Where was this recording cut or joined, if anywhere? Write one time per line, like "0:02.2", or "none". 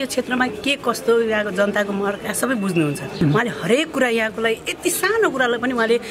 0:03.1